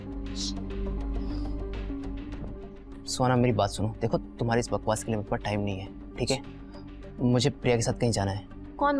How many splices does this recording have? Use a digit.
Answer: 0